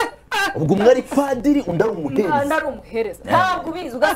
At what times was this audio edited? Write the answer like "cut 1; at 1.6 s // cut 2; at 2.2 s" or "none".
none